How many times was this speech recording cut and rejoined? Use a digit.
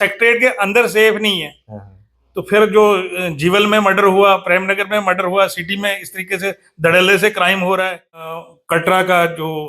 1